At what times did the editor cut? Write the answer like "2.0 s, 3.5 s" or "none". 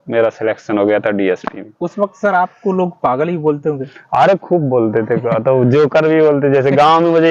none